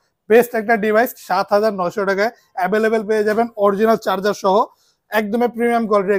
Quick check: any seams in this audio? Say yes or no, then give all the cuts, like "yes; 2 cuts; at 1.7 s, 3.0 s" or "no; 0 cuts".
no; 0 cuts